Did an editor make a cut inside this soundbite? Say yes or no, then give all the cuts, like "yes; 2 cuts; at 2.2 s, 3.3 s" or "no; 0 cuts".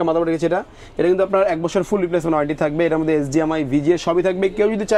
no; 0 cuts